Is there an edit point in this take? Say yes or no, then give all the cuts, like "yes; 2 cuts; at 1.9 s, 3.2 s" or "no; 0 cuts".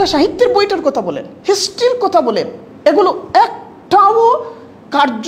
no; 0 cuts